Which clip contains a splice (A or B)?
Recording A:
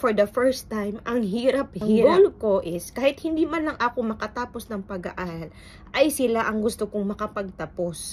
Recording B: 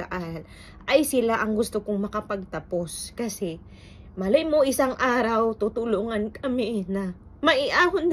A